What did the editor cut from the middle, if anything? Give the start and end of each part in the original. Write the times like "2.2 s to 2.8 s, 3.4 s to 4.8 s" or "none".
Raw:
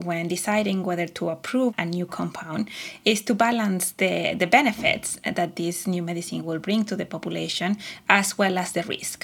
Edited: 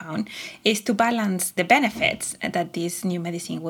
3.9 s to 4.3 s